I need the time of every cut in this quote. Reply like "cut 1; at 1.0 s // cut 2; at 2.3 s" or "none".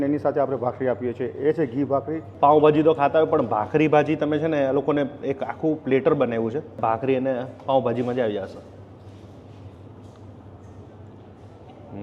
cut 1; at 2.2 s // cut 2; at 6.8 s